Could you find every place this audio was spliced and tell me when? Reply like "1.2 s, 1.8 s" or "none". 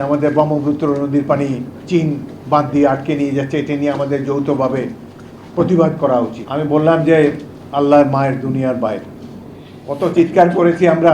6.4 s